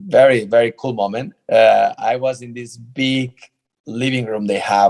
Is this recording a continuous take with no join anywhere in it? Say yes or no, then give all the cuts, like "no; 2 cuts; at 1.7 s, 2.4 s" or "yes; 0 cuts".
no; 1 cut; at 1.3 s